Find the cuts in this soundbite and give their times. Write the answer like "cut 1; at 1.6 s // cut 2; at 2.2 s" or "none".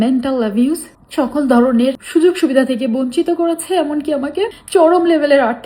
cut 1; at 1.0 s // cut 2; at 2.0 s // cut 3; at 4.6 s